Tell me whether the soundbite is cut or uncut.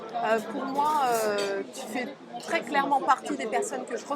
uncut